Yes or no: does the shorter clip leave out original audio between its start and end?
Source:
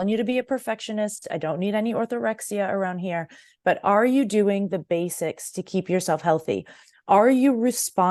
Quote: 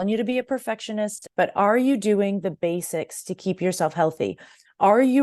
yes